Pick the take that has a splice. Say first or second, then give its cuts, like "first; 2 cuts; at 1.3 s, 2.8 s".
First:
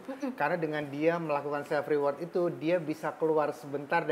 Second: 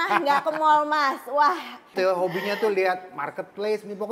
second; 1 cut; at 1.9 s